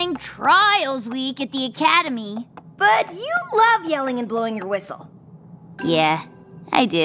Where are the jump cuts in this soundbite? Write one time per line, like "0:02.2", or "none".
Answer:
none